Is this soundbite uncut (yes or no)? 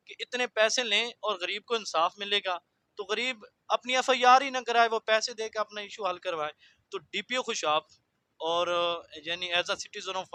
yes